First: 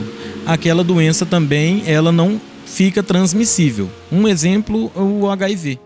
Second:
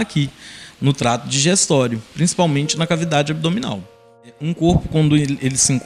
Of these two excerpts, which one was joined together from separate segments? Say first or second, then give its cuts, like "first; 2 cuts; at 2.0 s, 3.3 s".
second; 1 cut; at 4.4 s